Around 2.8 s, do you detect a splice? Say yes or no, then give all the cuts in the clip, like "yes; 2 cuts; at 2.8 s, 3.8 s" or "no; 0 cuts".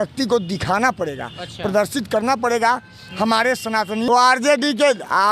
no; 1 cut; at 4.1 s